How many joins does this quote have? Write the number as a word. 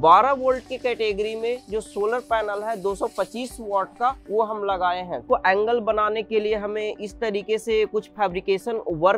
one